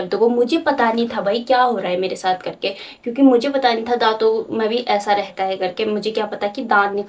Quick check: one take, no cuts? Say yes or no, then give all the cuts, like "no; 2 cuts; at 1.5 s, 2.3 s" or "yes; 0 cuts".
yes; 0 cuts